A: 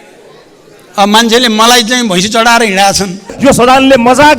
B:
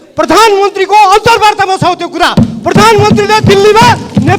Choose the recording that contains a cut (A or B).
A